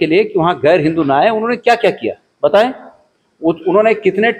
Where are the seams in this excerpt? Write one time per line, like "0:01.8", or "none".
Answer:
none

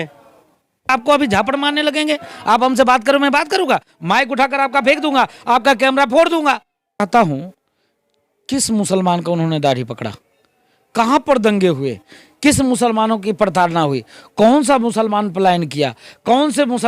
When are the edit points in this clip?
0:00.9
0:07.0

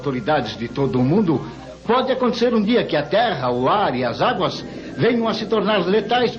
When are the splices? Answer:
none

